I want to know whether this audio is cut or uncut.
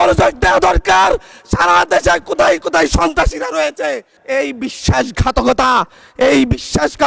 cut